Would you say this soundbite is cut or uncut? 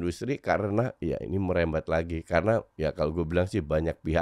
cut